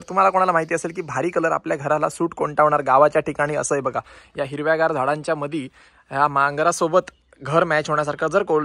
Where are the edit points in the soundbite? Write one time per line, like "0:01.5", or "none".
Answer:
none

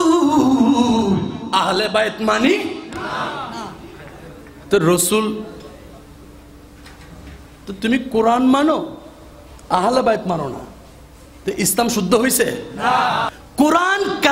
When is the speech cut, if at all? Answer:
0:13.4

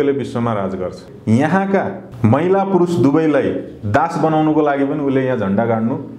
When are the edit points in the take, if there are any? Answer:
0:01.1
0:02.0

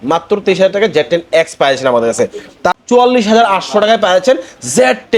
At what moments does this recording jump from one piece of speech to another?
0:02.7

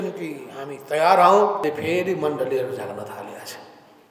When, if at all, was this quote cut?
0:01.6

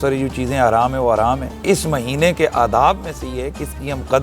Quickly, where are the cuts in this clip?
0:01.5

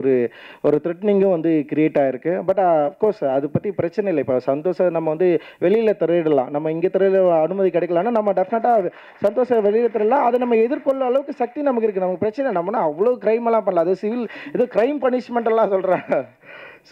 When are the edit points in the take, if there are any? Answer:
none

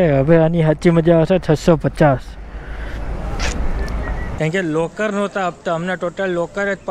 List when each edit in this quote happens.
0:04.2

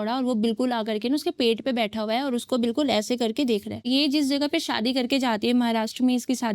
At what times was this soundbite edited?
0:03.8

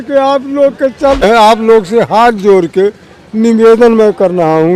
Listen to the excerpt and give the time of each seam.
0:01.2

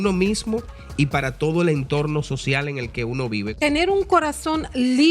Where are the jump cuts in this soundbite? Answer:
0:03.5

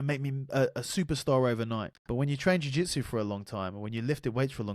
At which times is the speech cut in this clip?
0:02.0

